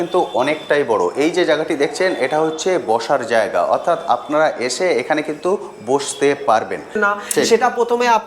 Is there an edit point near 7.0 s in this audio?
yes; 1 cut; at 7.0 s

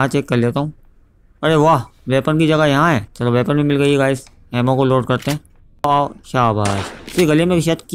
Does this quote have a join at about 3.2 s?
no; 1 cut; at 5.8 s

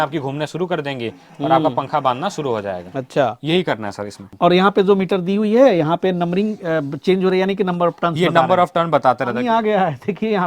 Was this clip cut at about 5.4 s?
no; 1 cut; at 9.4 s

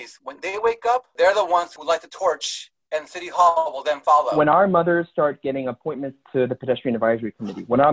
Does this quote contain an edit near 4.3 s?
yes; 3 cuts; at 1.1 s, 1.7 s, 4.3 s

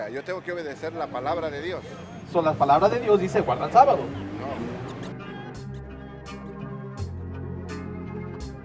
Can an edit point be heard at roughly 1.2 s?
no; 1 cut; at 4.8 s

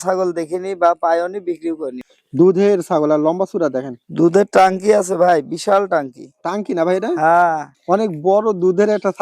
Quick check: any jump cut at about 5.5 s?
no; 2 cuts; at 1.9 s, 7.7 s

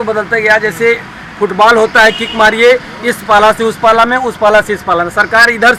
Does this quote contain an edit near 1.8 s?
no; 0 cuts

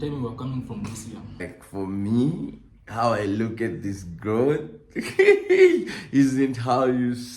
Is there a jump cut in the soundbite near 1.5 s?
yes; 1 cut; at 1.5 s

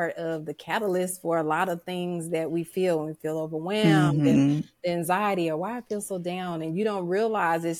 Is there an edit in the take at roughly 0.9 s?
no; 0 cuts

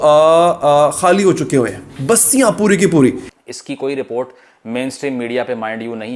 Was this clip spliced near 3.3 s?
yes; 1 cut; at 3.3 s

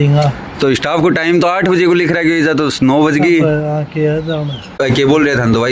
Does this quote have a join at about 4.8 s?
yes; 1 cut; at 4.8 s

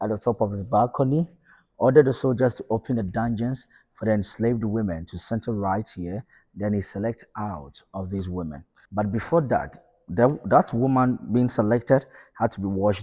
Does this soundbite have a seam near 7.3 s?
no; 1 cut; at 8.7 s

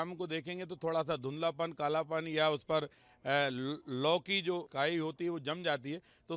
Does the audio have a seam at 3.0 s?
no; 1 cut; at 4.7 s

